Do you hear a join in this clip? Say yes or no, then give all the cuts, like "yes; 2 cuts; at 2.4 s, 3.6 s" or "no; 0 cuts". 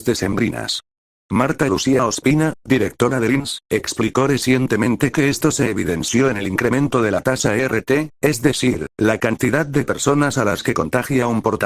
no; 0 cuts